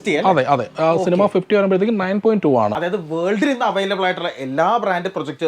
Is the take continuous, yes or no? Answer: no